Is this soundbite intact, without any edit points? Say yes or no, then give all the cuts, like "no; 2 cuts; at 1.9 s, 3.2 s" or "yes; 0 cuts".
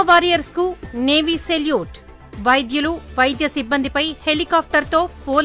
yes; 0 cuts